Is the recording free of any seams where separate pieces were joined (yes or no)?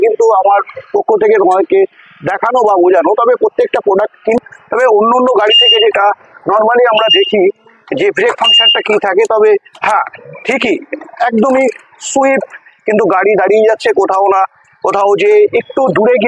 no